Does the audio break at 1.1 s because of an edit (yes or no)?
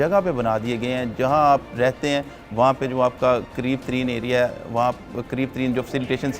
no